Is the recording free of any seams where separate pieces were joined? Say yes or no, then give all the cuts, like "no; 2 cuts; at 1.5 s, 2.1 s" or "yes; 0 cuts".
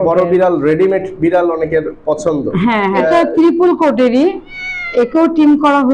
no; 1 cut; at 3.0 s